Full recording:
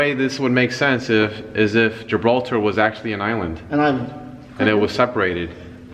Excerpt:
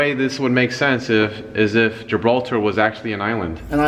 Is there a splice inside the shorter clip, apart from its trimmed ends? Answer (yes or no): no